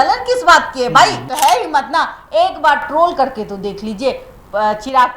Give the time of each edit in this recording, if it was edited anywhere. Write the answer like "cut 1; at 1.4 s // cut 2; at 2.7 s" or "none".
cut 1; at 1.2 s